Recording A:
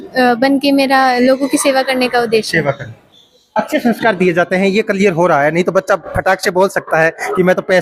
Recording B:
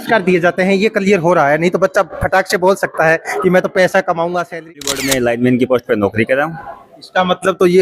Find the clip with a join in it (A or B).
B